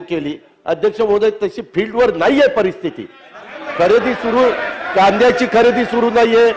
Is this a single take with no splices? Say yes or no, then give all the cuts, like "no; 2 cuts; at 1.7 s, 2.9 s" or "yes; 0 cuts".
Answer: yes; 0 cuts